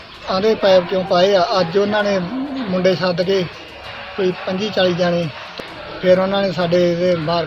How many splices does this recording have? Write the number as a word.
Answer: one